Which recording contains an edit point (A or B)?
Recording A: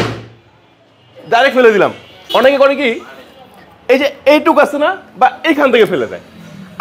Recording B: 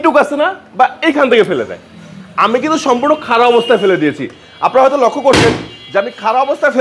A